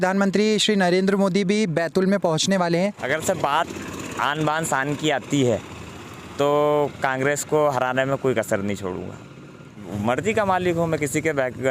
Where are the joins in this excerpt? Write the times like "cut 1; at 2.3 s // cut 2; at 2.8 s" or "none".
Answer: cut 1; at 3.0 s // cut 2; at 9.9 s